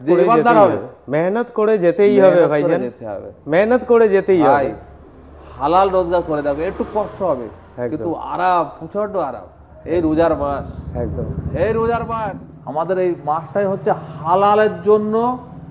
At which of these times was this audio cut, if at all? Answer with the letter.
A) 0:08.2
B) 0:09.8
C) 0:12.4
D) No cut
C